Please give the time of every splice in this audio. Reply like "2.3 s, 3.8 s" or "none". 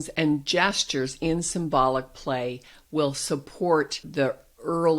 4.0 s